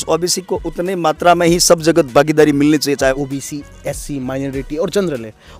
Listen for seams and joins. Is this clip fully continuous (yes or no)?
no